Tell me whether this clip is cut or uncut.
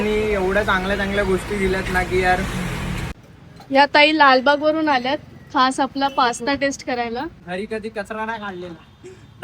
cut